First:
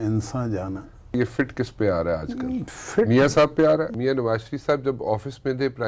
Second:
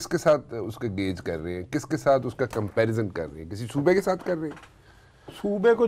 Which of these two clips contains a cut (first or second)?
first